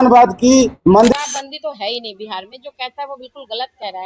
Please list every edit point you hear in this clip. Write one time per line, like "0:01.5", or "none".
0:01.1